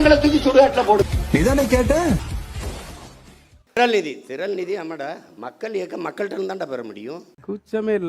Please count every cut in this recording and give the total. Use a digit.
1